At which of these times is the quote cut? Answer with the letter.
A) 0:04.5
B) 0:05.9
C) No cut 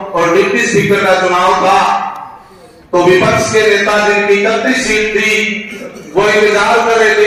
C